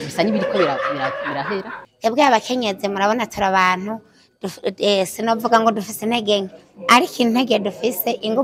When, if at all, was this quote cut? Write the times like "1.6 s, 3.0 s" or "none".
1.7 s